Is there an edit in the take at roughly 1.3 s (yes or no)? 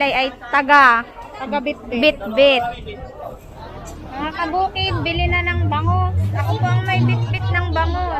no